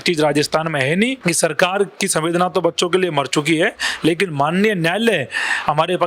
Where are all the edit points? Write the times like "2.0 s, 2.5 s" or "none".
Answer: 1.2 s